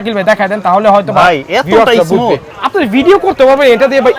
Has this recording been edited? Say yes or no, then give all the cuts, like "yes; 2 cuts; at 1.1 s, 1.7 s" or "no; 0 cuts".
yes; 1 cut; at 2.5 s